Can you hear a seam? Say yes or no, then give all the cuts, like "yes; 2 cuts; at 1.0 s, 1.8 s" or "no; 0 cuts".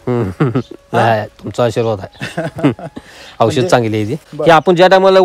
yes; 1 cut; at 4.2 s